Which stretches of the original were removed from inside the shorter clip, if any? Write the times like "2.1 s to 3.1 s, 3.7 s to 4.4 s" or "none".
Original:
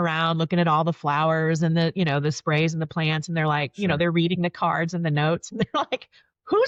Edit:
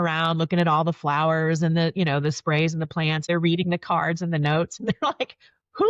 3.3 s to 4.0 s